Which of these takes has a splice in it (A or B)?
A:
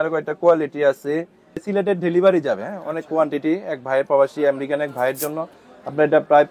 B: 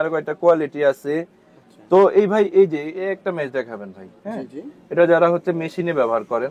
A